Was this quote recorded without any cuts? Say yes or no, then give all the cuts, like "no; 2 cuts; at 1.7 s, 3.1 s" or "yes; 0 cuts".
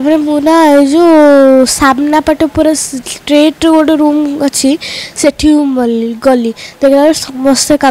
yes; 0 cuts